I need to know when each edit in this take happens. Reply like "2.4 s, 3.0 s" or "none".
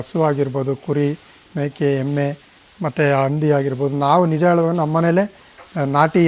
none